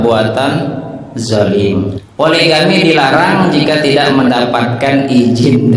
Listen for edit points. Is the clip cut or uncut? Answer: cut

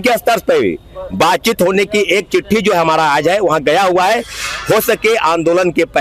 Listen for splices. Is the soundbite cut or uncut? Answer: uncut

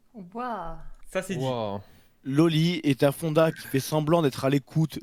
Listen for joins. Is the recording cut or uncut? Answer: uncut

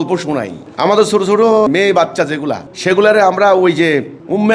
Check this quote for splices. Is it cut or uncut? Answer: cut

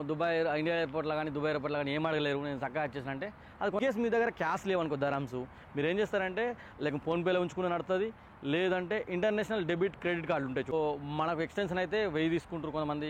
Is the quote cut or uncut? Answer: cut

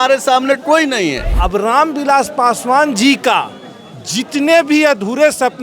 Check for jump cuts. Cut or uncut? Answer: cut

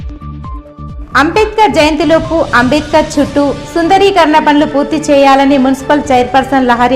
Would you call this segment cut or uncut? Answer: cut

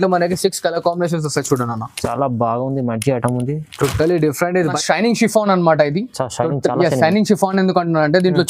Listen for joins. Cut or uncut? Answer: cut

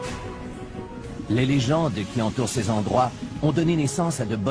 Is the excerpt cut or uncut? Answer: uncut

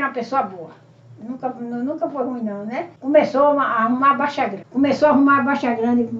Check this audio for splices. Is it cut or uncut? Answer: cut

